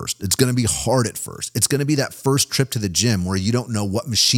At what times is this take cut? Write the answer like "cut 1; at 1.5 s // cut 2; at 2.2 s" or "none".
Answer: none